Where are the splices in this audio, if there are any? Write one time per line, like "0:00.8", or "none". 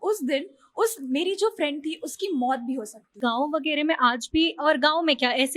0:03.2